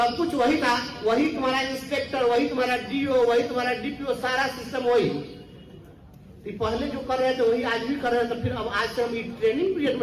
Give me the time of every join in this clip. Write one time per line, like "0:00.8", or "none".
none